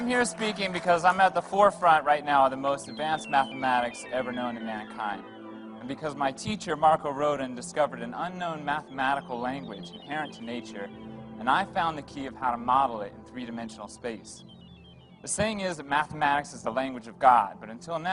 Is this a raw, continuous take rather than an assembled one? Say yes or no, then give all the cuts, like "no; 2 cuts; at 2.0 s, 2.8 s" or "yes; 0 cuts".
yes; 0 cuts